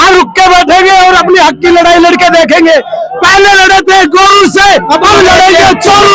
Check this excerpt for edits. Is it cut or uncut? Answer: uncut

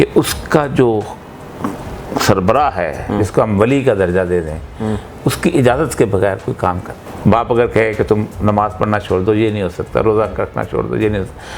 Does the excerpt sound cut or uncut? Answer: cut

